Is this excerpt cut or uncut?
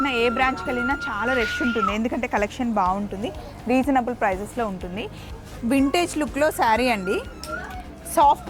cut